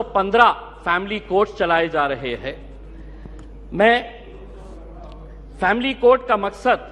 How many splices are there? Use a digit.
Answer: 0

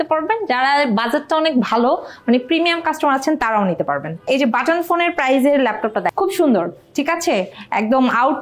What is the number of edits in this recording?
2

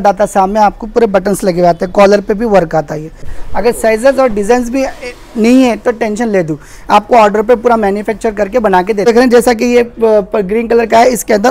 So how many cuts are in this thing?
2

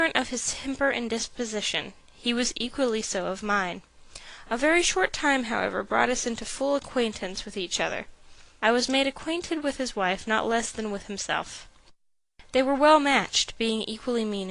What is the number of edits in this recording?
1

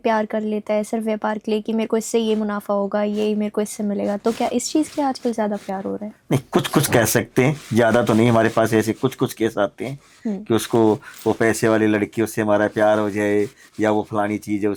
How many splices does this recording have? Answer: 0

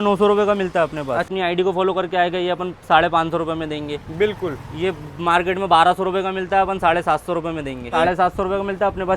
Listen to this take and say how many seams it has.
2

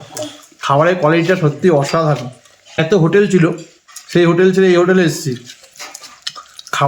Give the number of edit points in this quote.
1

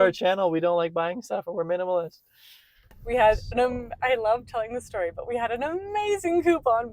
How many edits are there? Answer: 1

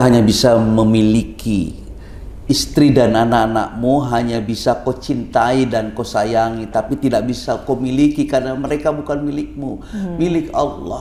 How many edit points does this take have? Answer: 0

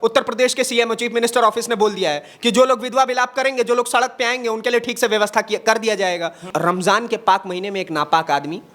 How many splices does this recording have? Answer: 1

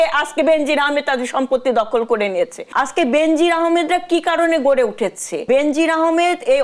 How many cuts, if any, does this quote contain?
2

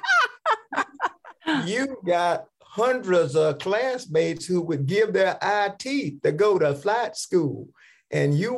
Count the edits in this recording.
1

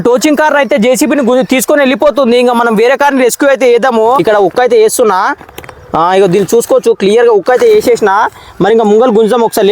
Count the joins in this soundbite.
1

